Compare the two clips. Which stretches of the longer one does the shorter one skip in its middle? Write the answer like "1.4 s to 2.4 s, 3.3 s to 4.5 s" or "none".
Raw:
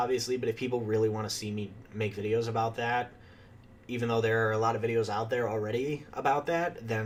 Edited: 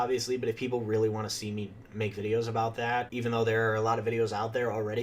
3.1 s to 3.9 s

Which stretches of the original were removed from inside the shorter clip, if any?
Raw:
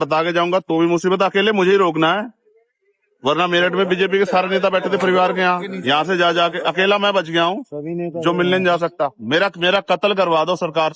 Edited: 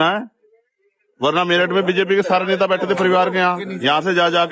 none

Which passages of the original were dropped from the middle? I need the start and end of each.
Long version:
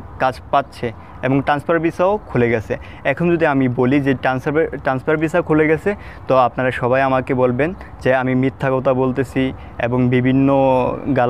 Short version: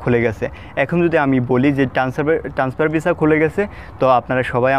none

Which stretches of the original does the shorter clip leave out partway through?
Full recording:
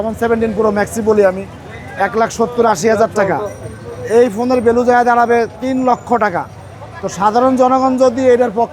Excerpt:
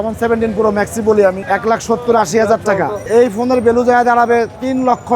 1.4 s to 1.9 s, 3.5 s to 4.0 s

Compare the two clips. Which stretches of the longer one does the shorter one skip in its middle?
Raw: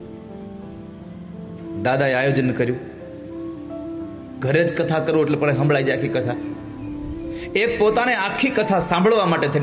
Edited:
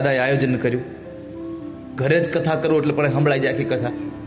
3.7 s to 4.2 s

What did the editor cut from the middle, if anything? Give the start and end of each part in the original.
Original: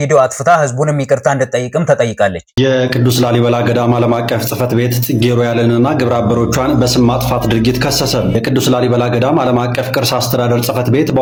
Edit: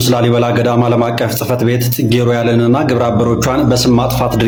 none

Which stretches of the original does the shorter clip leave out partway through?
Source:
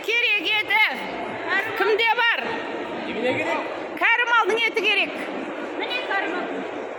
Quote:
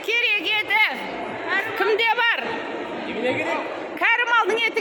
none

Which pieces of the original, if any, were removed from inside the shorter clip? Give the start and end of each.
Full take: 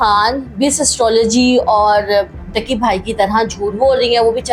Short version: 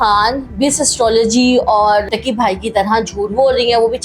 2.1 s to 2.5 s

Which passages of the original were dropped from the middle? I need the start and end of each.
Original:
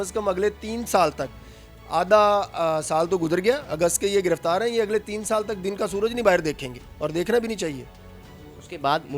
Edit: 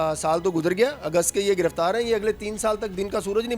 none

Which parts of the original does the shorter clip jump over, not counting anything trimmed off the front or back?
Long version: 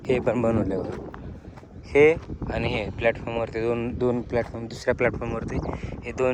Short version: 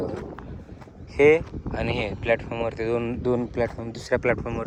none

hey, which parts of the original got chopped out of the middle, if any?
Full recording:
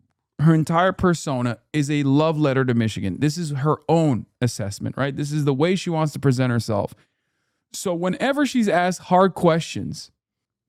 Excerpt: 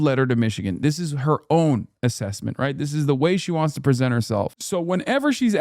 7.0 s to 7.7 s

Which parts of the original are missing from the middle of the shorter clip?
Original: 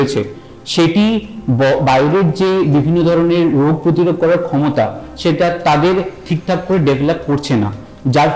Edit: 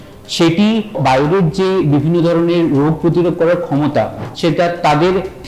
1.4 s to 1.8 s

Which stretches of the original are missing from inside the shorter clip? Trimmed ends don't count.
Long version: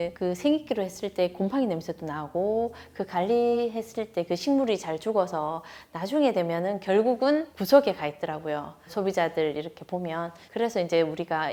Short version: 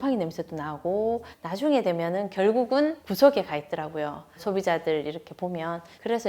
2.8 s to 5.8 s

